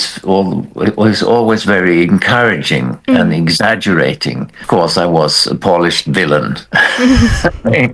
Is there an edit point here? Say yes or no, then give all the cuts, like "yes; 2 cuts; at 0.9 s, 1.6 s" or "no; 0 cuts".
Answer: yes; 1 cut; at 4.6 s